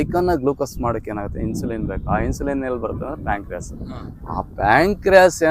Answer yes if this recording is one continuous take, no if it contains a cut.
yes